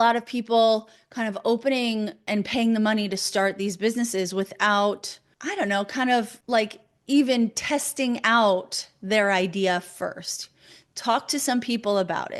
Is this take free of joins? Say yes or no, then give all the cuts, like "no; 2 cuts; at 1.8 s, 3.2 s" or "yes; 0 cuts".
no; 1 cut; at 2.3 s